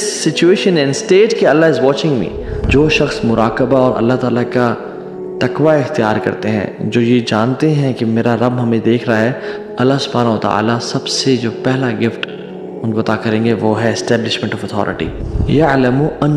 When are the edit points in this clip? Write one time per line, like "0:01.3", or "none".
0:02.6
0:15.3